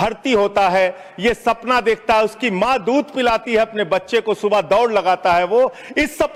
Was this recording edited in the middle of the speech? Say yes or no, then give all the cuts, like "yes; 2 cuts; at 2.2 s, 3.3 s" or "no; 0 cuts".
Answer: no; 0 cuts